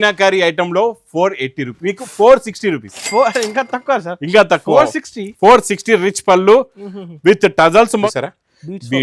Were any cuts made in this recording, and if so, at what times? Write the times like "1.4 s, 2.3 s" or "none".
8.1 s